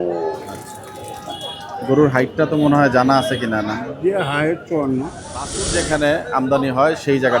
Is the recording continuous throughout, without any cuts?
no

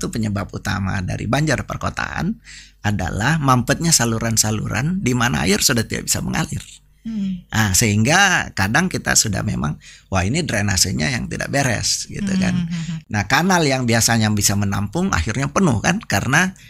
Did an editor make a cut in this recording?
no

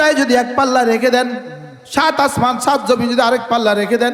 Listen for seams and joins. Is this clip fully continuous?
yes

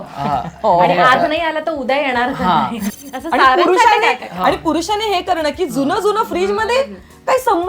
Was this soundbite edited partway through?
yes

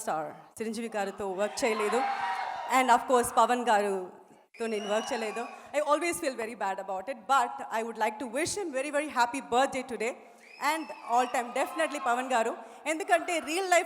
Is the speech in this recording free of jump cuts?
yes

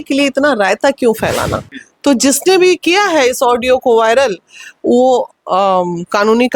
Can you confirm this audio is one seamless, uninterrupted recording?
no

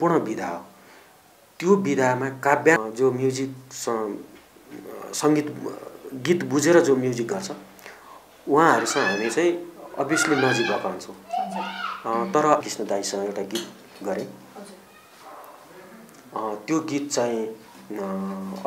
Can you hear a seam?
yes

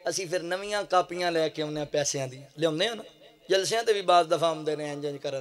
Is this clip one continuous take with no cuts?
yes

